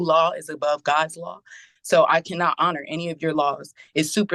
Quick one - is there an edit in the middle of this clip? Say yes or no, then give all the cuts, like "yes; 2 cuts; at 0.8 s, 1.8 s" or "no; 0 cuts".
no; 0 cuts